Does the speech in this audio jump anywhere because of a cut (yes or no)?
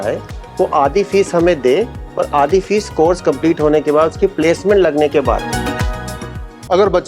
yes